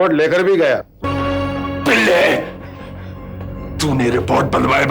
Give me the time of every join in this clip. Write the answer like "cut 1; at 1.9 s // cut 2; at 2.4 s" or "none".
cut 1; at 1.0 s